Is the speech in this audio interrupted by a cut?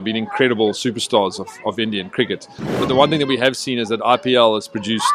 yes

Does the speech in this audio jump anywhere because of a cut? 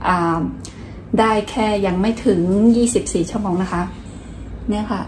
yes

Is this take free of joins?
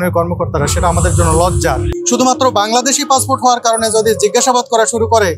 no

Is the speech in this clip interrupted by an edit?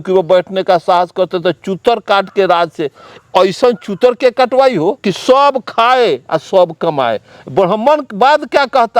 yes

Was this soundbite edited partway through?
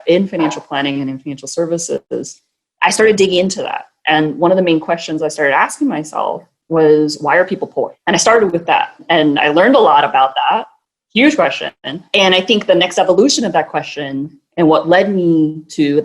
yes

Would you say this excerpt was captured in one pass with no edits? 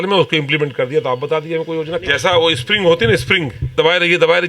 no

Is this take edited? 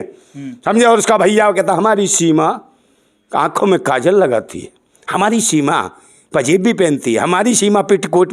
no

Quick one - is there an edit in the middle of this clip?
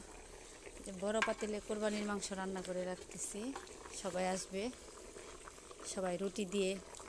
no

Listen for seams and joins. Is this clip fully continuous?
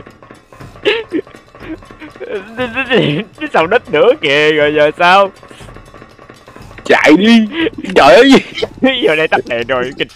yes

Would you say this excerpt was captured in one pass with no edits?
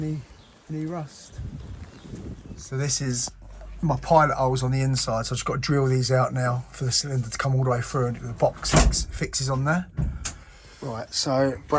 no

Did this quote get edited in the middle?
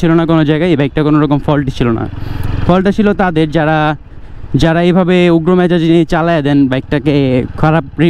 no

